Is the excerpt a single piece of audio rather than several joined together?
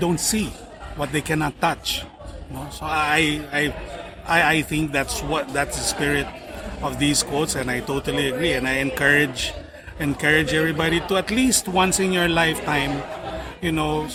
yes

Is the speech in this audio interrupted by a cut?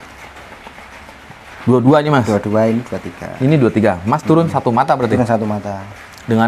no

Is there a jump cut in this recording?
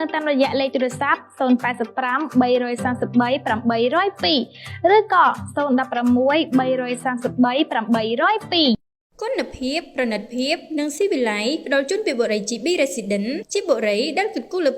yes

